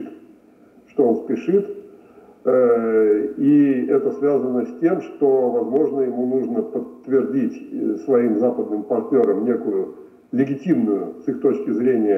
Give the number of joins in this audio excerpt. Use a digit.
0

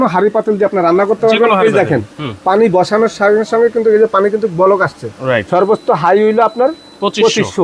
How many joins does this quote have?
1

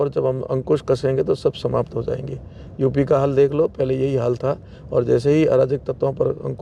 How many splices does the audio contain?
0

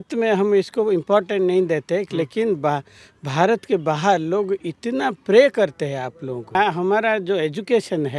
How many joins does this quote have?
1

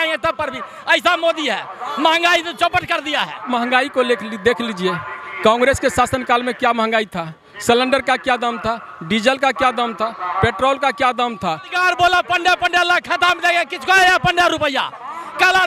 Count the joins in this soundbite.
2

